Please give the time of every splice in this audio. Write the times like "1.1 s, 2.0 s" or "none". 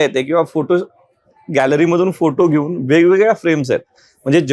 none

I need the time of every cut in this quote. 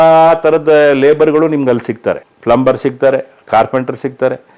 none

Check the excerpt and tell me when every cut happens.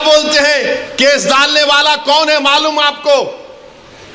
none

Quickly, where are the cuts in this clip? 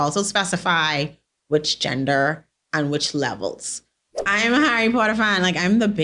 4.1 s

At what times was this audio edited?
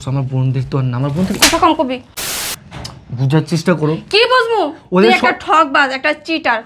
2.2 s

